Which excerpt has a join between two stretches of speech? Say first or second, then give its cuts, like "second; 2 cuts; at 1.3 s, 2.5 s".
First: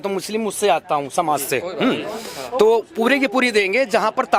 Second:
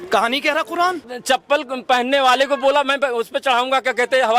second; 1 cut; at 1.1 s